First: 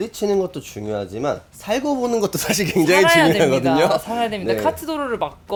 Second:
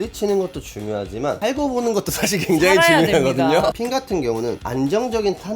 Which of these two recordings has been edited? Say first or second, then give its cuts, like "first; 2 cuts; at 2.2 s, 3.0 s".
second; 2 cuts; at 1.4 s, 3.8 s